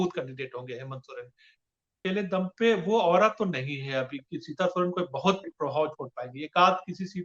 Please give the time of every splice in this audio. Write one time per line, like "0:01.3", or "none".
0:02.0